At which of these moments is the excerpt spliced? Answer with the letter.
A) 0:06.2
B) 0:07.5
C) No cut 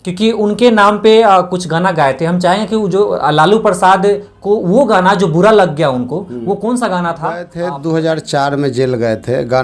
B